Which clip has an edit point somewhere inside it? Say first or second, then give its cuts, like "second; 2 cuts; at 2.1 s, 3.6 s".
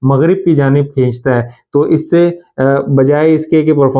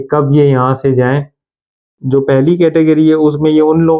second; 1 cut; at 2.0 s